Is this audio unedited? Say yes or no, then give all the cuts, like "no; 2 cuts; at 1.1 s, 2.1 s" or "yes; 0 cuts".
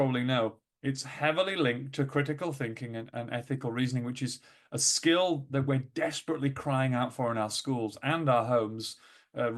yes; 0 cuts